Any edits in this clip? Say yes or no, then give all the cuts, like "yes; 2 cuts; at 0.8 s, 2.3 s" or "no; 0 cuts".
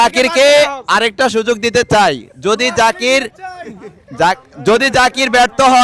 no; 0 cuts